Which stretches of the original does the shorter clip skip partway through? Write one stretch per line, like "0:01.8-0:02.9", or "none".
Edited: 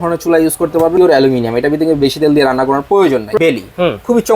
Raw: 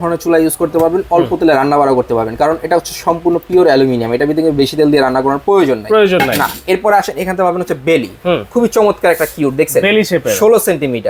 0:01.0-0:03.5
0:05.9-0:07.8